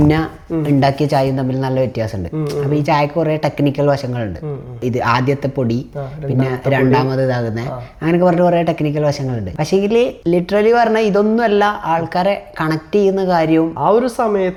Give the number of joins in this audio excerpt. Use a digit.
0